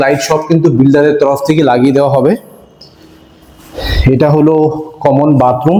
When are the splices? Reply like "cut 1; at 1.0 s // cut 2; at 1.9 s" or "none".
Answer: none